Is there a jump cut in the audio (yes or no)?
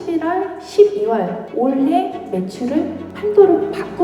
yes